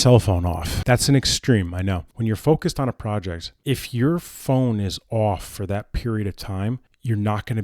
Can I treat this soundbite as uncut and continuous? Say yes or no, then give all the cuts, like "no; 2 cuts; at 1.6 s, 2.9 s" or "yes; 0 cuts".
no; 2 cuts; at 0.8 s, 2.1 s